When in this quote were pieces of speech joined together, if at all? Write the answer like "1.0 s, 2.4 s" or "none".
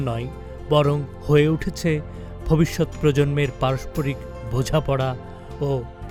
none